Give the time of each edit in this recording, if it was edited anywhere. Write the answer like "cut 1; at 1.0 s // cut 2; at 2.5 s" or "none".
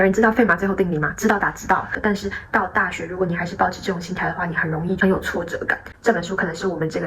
cut 1; at 1.9 s // cut 2; at 5.9 s